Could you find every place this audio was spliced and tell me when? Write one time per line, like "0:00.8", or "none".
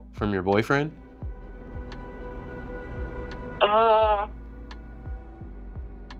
none